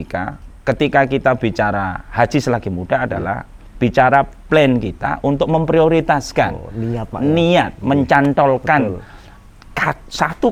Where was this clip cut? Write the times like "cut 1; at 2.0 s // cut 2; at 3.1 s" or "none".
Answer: none